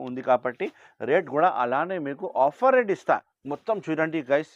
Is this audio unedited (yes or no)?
no